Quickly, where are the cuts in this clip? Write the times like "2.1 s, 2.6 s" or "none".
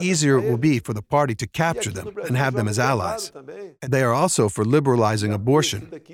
3.7 s